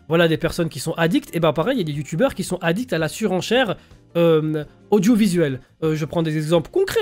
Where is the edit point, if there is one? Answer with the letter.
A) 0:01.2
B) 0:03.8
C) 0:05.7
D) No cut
D